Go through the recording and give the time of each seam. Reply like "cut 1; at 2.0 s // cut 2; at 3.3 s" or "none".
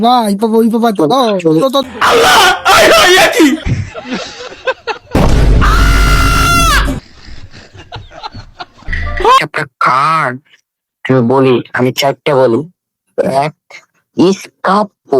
cut 1; at 9.4 s